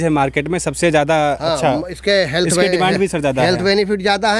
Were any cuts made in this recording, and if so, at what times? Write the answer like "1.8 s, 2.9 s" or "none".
none